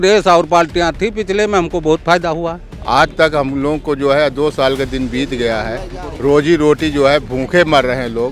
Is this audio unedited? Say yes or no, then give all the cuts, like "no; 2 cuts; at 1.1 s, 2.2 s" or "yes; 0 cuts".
no; 1 cut; at 2.7 s